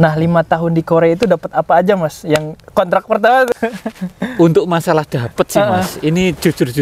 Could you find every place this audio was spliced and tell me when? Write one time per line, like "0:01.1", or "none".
0:03.5